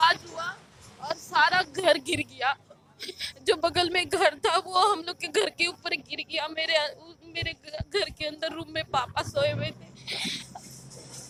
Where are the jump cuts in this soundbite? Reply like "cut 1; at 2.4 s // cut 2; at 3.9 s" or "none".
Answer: none